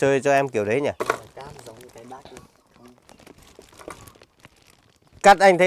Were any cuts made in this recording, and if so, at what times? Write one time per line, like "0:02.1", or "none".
0:01.0